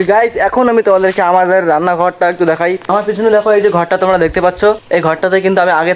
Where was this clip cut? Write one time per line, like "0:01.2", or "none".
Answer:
0:02.8
0:04.8